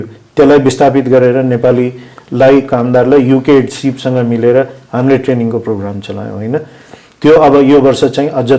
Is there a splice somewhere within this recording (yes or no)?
no